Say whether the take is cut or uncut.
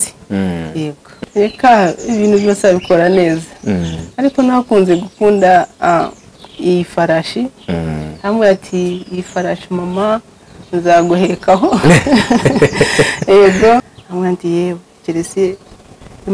cut